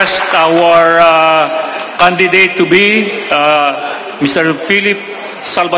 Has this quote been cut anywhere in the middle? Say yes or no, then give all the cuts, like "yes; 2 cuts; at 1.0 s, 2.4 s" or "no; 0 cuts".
no; 0 cuts